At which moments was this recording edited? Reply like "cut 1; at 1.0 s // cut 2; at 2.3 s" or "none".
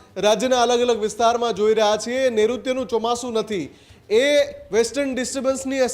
none